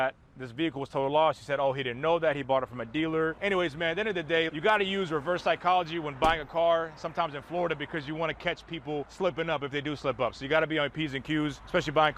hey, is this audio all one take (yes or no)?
yes